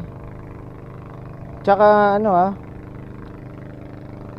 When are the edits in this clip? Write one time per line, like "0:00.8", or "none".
none